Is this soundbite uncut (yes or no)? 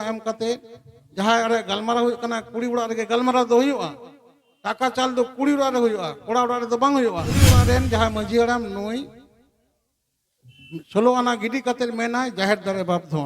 no